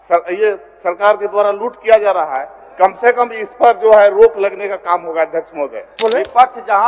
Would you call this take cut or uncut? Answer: cut